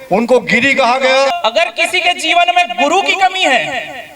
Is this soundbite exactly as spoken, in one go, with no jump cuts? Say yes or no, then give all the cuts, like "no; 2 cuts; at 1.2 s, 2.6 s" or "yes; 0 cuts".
no; 1 cut; at 1.3 s